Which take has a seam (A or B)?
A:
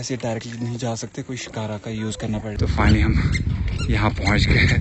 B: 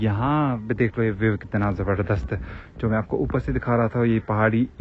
A